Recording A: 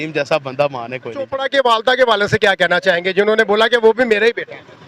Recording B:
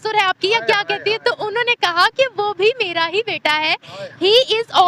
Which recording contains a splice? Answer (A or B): A